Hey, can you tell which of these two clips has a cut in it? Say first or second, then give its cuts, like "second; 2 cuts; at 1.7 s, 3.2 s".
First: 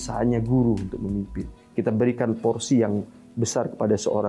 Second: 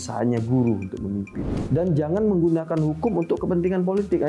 second; 1 cut; at 1.6 s